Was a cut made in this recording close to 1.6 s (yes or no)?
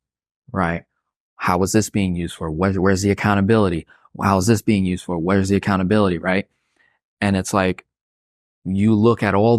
no